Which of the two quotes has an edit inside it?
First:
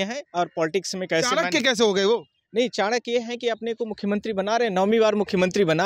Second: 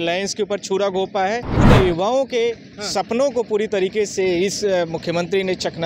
second; 1 cut; at 1.5 s

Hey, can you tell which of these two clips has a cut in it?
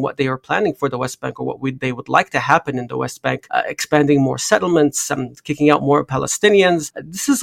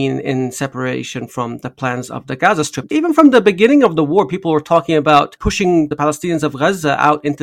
second; 2 cuts; at 2.8 s, 5.8 s

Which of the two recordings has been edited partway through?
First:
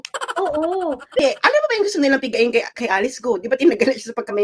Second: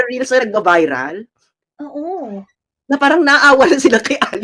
first; 1 cut; at 1.2 s

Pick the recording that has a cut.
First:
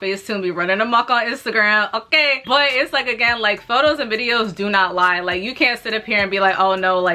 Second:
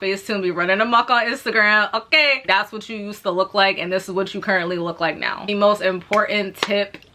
second; 2 cuts; at 2.4 s, 5.5 s

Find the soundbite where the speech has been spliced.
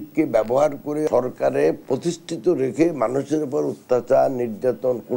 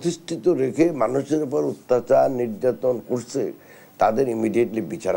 first; 1 cut; at 1.1 s

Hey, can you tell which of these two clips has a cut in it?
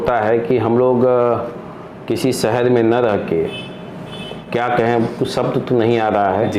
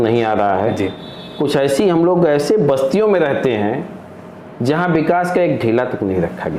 first; 1 cut; at 4.4 s

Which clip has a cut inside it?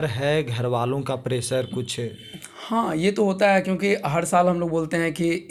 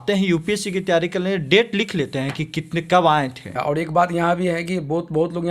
second; 1 cut; at 3.6 s

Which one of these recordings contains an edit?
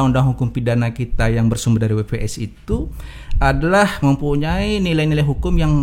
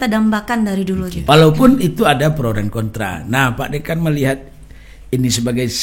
second; 1 cut; at 1.1 s

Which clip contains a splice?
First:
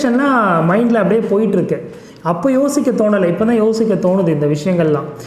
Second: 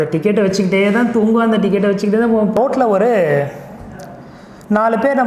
second; 1 cut; at 2.5 s

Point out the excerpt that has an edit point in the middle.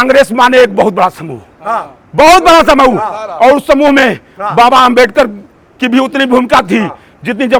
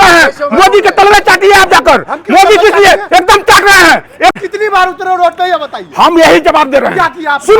second; 1 cut; at 4.3 s

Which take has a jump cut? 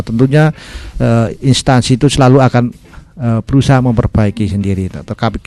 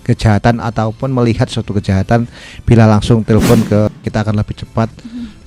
second; 1 cut; at 3.9 s

